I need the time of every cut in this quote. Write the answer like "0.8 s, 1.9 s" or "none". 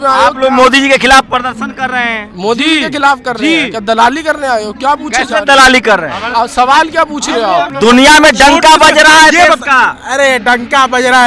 7.7 s